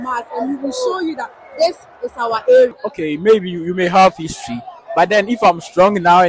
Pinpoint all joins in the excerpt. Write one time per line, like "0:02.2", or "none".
0:02.9